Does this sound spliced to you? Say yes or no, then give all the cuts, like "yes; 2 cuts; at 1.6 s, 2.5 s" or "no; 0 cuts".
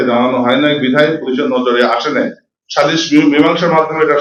no; 0 cuts